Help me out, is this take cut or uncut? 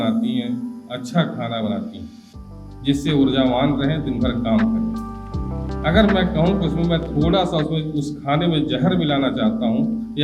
uncut